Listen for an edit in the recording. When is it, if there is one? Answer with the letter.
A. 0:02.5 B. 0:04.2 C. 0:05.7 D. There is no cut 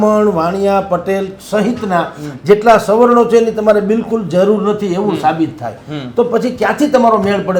D